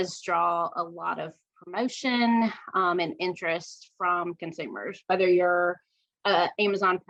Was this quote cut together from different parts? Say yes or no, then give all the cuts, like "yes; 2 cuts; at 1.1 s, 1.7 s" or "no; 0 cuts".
no; 0 cuts